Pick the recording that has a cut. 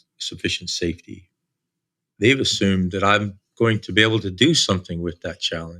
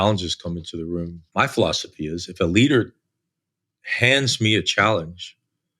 second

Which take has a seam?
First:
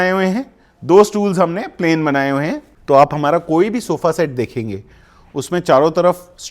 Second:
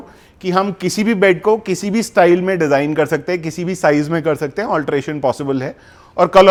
first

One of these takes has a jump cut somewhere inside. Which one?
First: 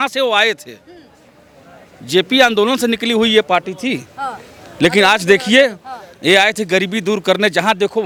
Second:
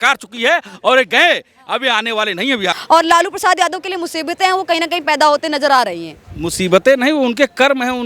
second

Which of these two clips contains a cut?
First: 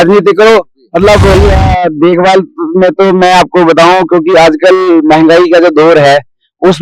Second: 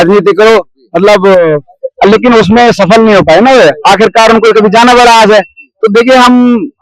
first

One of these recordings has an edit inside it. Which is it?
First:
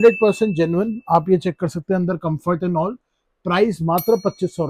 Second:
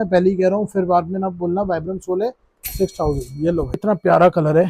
second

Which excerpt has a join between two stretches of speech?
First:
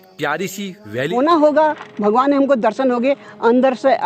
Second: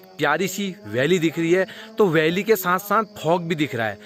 first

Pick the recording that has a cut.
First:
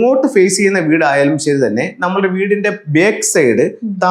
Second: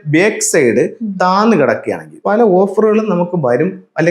second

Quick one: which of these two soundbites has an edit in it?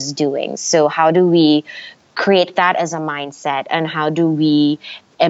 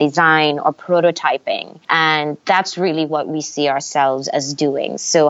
second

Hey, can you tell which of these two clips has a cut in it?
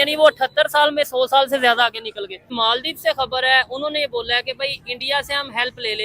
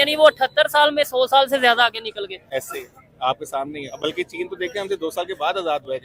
first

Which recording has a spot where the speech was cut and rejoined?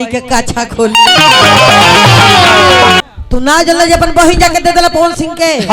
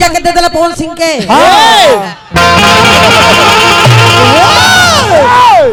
first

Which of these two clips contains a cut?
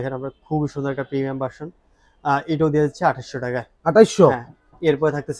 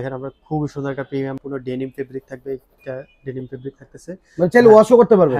second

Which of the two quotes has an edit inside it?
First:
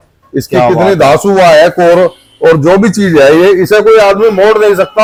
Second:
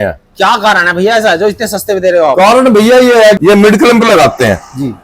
second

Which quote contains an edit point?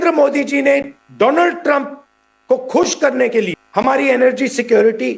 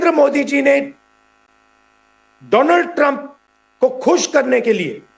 first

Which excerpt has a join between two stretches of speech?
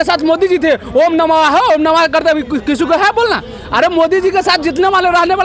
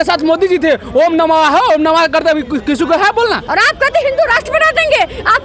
second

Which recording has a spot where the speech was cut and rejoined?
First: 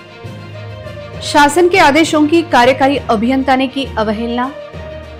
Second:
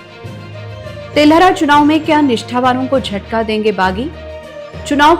second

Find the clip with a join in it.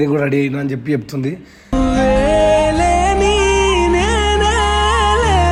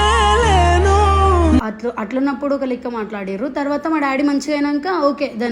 second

